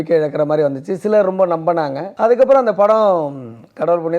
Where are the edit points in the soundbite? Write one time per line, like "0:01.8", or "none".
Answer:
0:02.0

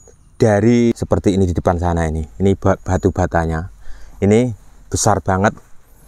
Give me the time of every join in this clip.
0:00.9

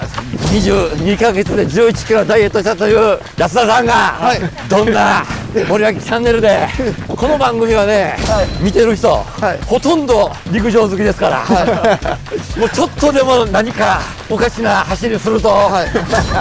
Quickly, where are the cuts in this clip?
0:03.3
0:04.5
0:05.4
0:07.0
0:08.5
0:09.6
0:10.4
0:14.1

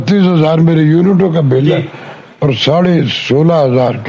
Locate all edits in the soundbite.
none

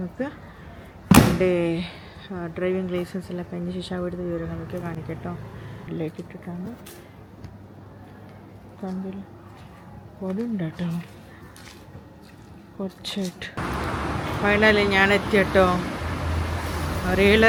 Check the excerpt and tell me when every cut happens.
none

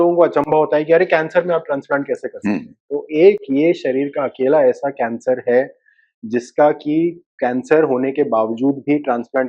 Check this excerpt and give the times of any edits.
none

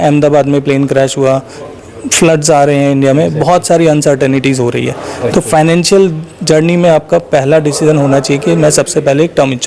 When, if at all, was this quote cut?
0:05.1

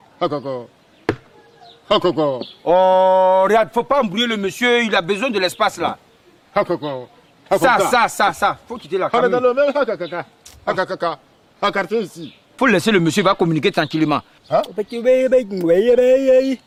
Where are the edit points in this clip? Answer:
none

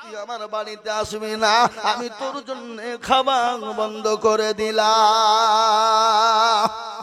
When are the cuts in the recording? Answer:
none

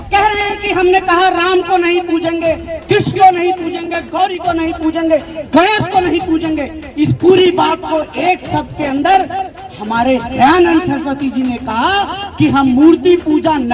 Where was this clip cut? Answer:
none

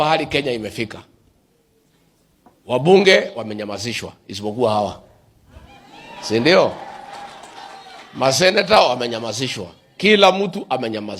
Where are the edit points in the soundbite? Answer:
none

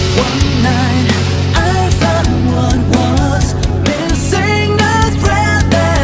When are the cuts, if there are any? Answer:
none

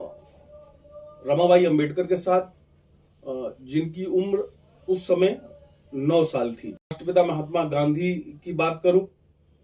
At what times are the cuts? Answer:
0:07.0

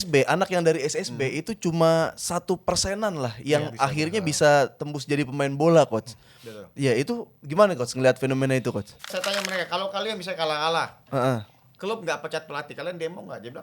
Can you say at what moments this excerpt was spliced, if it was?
0:09.1

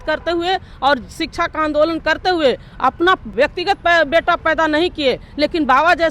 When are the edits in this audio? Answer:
0:03.3

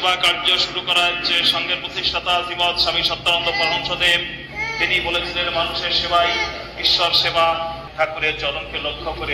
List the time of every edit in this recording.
0:07.9

